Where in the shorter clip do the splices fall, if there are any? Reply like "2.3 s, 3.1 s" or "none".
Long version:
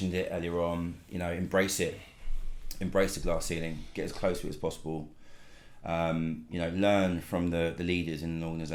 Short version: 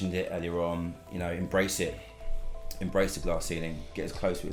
none